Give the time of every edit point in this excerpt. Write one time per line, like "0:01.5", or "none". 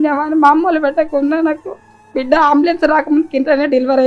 none